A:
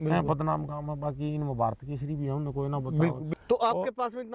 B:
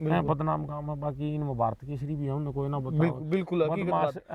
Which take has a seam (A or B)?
A